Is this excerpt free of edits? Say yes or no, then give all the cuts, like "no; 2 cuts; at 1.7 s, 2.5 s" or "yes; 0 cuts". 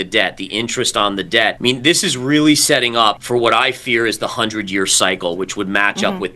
no; 2 cuts; at 1.6 s, 3.2 s